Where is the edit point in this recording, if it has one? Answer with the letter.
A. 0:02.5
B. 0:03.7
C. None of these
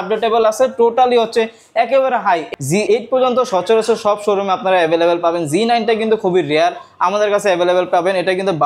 A